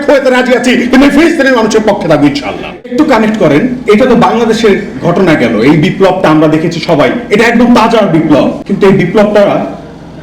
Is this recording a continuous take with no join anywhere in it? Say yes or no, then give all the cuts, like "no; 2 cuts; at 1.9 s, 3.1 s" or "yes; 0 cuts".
no; 2 cuts; at 2.9 s, 8.6 s